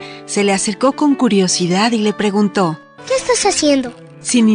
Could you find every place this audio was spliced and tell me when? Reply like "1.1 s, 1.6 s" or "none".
2.9 s